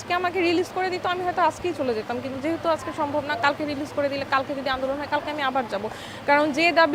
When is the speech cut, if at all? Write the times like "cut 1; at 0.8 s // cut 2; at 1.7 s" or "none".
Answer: none